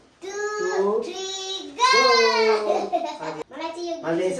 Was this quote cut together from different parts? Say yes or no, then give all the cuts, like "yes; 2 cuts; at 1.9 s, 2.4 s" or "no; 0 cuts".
yes; 1 cut; at 3.3 s